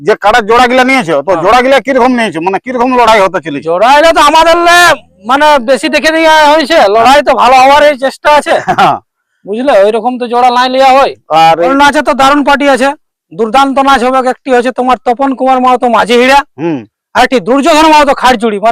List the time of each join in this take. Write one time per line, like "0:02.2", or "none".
0:11.7